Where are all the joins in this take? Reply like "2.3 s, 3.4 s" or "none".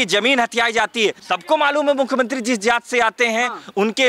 1.2 s